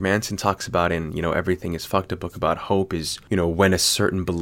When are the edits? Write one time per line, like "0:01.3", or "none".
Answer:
0:03.1